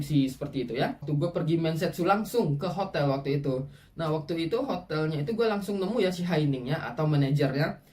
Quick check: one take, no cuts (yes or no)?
no